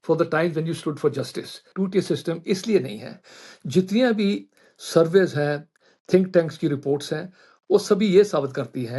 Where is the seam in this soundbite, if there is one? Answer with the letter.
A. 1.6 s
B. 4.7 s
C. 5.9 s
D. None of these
A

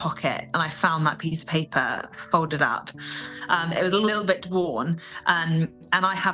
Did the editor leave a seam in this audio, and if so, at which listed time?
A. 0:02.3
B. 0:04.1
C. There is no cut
B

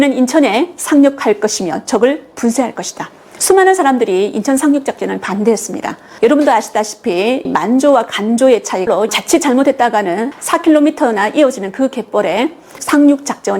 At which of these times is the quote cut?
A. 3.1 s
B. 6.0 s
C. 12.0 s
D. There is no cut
D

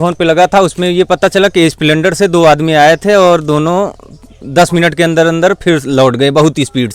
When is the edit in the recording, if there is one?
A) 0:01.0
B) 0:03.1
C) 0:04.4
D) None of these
D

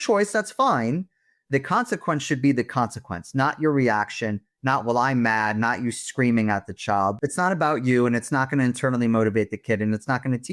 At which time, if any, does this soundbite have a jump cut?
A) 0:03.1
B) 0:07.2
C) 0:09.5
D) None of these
B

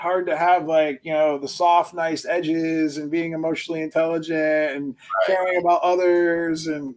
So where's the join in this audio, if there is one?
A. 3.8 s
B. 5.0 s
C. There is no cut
C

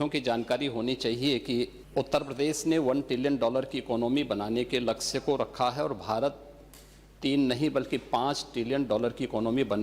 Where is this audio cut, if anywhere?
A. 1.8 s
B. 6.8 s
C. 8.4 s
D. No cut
A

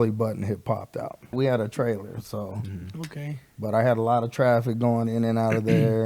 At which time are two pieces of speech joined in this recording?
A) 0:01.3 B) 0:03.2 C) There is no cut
A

